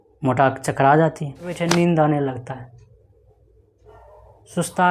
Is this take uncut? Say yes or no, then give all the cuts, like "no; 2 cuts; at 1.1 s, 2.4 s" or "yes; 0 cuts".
no; 1 cut; at 1.6 s